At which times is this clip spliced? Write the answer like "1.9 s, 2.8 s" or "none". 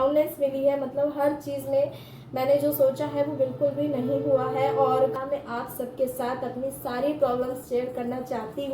5.2 s